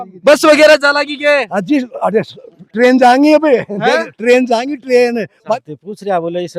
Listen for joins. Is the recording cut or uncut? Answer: cut